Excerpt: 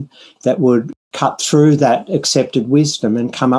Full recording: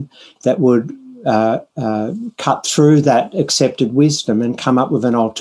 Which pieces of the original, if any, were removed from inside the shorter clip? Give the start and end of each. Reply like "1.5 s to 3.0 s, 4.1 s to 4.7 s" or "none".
1.0 s to 2.3 s